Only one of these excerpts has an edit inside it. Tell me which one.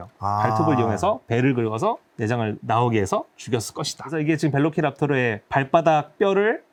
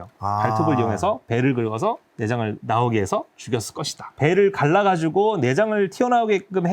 second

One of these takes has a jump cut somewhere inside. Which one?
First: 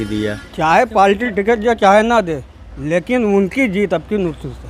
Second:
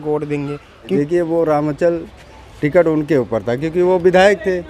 second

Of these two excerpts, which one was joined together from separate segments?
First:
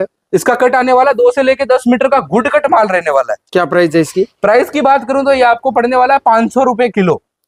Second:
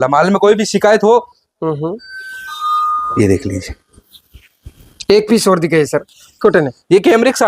second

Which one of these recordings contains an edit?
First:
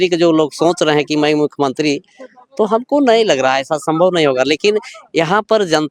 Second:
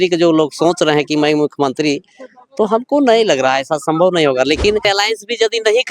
second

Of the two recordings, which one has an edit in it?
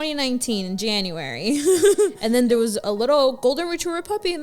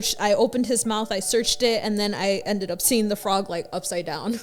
first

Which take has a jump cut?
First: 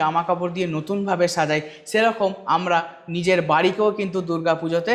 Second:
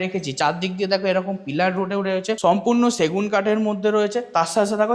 second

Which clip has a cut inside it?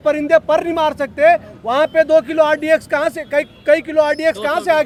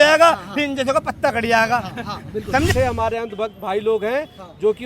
second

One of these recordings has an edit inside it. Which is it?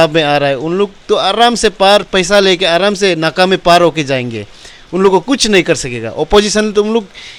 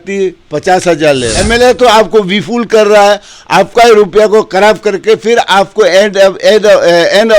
second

